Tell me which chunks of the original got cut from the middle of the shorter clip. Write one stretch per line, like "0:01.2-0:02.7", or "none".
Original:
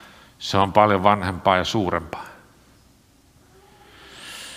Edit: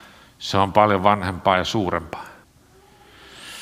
0:02.5-0:03.3